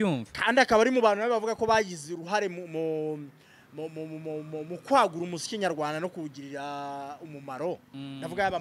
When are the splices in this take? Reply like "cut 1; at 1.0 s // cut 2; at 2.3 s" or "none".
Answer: none